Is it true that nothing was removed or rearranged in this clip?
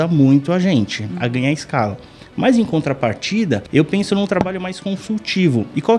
no; 1 cut; at 3.7 s

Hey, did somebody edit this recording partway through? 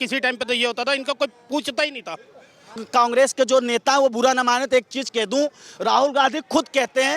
yes; 1 cut; at 2.7 s

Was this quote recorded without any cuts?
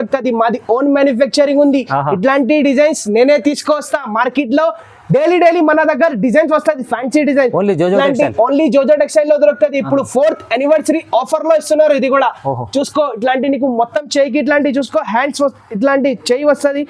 yes; 0 cuts

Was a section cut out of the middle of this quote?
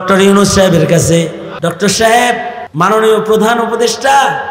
yes; 2 cuts; at 1.4 s, 2.6 s

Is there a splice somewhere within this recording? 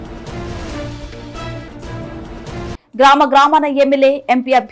no; 0 cuts

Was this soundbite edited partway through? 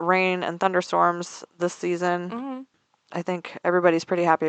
yes; 1 cut; at 2.7 s

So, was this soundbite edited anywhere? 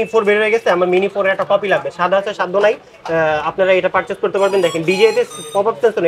no; 0 cuts

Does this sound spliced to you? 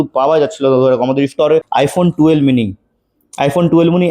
yes; 1 cut; at 1.7 s

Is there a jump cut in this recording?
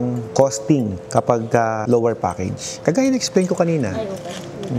no; 0 cuts

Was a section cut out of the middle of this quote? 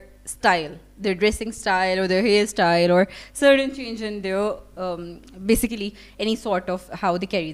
no; 0 cuts

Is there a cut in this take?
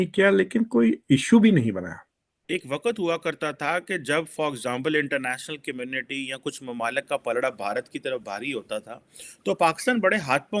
yes; 1 cut; at 2.5 s

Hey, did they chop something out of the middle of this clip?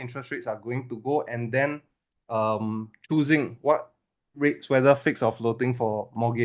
no; 0 cuts

